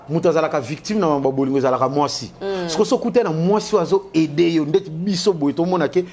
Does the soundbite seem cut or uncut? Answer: uncut